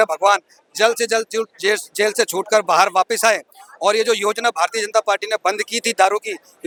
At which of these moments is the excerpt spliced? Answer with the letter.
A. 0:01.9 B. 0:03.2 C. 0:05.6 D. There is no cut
D